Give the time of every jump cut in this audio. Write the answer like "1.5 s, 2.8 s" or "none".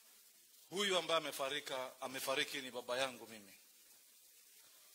none